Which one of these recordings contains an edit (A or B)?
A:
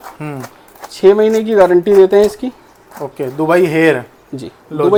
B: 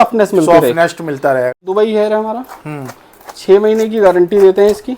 B